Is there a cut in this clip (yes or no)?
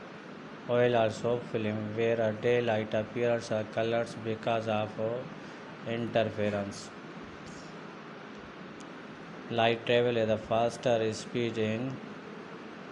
no